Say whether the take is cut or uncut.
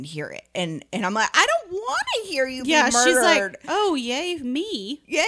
uncut